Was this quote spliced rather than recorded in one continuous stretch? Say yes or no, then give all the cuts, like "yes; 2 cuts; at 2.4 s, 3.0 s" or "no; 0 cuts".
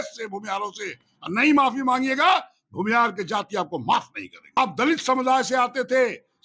yes; 1 cut; at 4.6 s